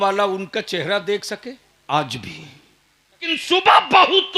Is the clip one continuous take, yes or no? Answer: no